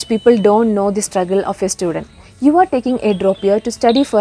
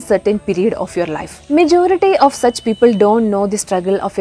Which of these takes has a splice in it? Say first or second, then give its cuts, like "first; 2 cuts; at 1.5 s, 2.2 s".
second; 1 cut; at 1.3 s